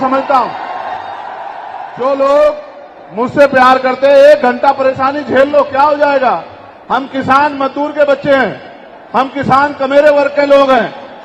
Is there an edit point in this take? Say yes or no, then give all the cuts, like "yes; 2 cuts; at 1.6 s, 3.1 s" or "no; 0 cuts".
yes; 1 cut; at 1.7 s